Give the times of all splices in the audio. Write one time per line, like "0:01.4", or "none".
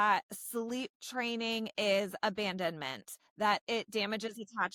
none